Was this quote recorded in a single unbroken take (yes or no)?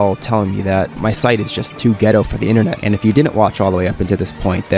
no